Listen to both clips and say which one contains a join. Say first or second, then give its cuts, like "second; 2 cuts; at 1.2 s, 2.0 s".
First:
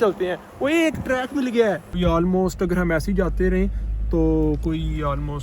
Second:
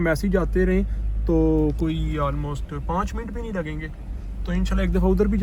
first; 1 cut; at 1.9 s